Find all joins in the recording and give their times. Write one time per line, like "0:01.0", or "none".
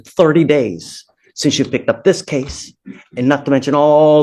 none